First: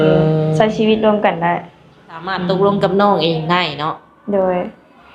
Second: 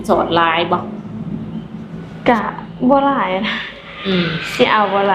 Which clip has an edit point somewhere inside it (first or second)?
first